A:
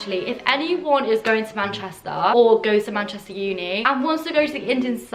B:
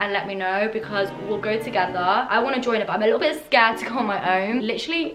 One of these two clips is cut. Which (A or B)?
A